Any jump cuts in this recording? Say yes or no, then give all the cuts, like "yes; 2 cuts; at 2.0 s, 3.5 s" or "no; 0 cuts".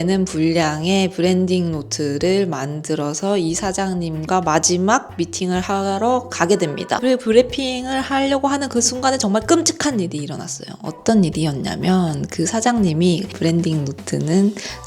yes; 2 cuts; at 7.0 s, 13.3 s